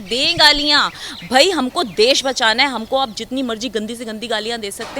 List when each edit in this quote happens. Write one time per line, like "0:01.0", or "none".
none

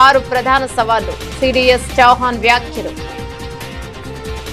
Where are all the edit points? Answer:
0:03.6

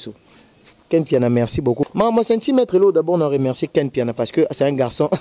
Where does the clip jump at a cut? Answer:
0:01.9

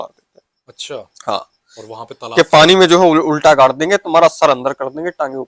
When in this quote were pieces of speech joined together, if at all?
none

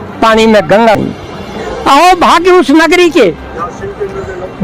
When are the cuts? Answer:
0:01.0

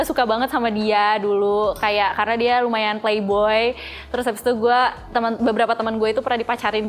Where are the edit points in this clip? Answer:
none

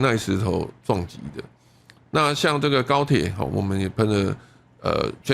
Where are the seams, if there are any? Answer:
none

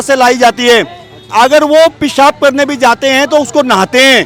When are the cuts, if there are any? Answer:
none

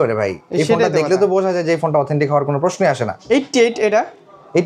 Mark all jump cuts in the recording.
none

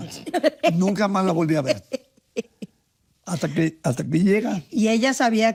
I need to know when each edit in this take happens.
none

